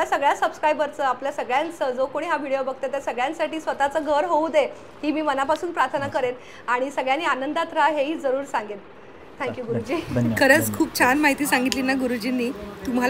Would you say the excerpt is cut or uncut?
uncut